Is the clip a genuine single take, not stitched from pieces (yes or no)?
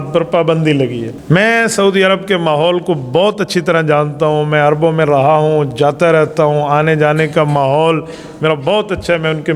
no